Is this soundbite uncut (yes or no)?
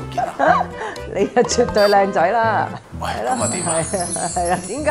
yes